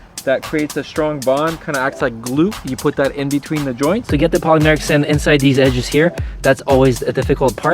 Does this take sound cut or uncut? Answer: cut